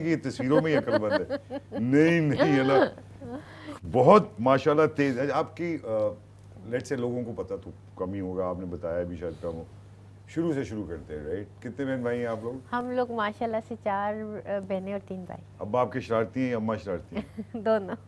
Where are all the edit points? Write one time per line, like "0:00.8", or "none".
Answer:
none

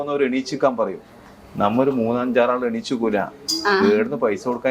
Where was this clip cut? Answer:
none

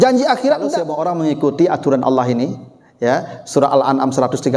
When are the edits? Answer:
0:00.9

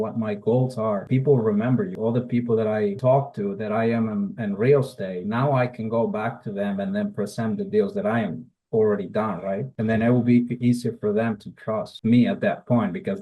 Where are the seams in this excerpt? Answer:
0:01.1
0:01.9
0:03.0

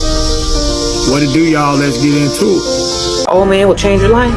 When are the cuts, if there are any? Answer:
0:03.2

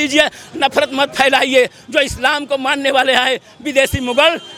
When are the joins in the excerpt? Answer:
none

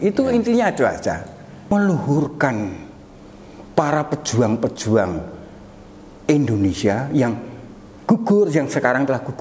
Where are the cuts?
0:01.7

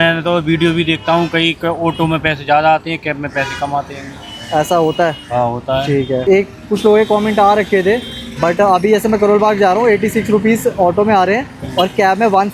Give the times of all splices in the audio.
none

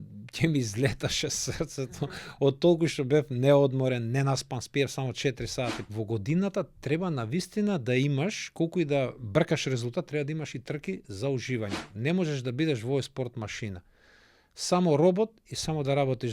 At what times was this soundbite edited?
0:05.8
0:11.8

